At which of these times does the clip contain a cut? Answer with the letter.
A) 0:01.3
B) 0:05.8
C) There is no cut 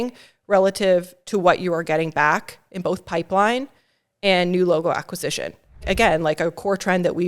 B